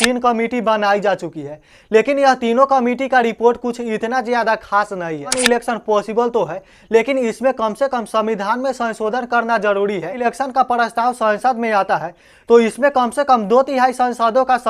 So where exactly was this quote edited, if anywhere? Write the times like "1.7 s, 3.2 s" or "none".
5.3 s, 10.2 s